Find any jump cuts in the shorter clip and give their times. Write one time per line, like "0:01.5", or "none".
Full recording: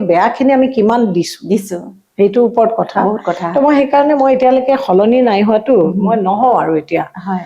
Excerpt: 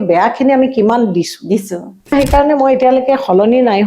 0:02.1